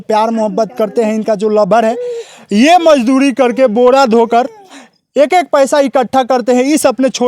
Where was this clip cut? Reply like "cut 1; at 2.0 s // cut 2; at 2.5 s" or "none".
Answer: none